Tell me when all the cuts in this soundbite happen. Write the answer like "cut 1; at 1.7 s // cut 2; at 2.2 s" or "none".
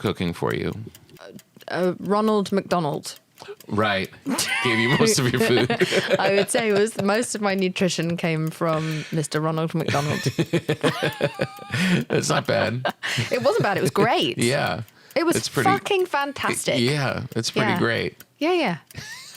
cut 1; at 1.1 s